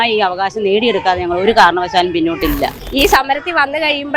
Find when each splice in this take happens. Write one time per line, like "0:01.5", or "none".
0:02.8